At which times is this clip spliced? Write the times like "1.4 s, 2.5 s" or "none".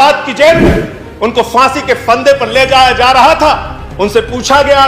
none